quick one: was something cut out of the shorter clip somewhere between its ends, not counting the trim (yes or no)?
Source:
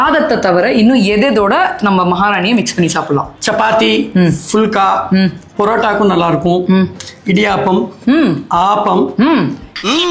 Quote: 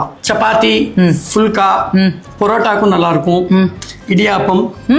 no